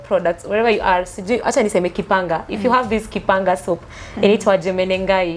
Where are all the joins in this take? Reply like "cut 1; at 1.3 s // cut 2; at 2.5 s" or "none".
none